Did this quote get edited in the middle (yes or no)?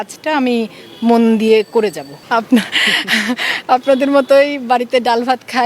yes